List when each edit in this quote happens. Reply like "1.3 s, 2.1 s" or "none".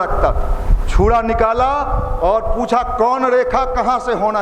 none